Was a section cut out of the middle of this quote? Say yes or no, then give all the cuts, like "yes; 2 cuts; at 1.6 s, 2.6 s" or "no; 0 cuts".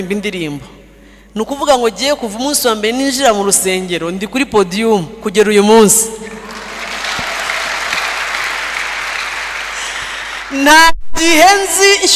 no; 0 cuts